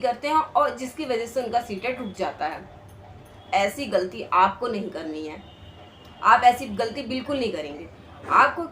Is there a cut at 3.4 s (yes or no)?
yes